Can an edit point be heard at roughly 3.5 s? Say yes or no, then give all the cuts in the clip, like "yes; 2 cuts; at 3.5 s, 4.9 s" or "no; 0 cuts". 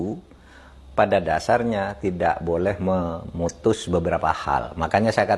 no; 0 cuts